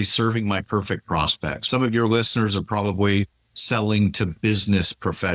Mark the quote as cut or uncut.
cut